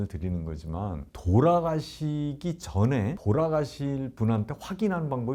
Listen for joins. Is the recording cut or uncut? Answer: uncut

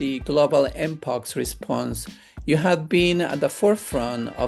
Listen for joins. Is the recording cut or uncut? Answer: uncut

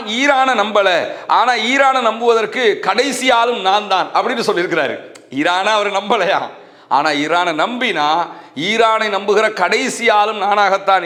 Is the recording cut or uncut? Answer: uncut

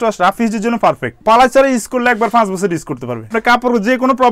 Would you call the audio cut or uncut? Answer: cut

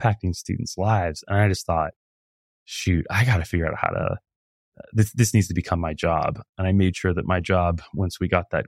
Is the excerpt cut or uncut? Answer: cut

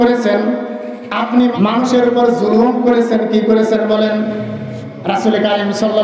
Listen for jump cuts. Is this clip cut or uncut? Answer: cut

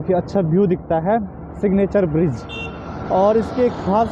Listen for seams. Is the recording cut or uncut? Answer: uncut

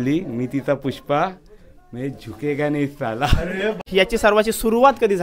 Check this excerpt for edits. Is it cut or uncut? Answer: cut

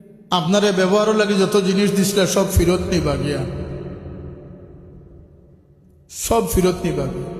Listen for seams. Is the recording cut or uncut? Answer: uncut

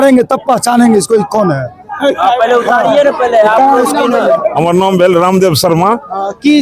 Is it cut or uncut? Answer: cut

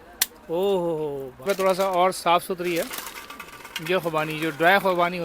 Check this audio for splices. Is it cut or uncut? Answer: cut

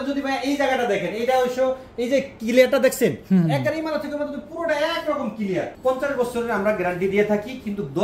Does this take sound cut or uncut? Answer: cut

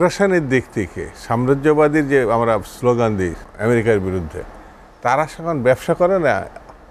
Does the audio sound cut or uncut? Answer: cut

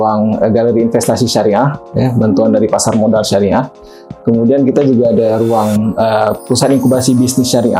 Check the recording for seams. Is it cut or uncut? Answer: uncut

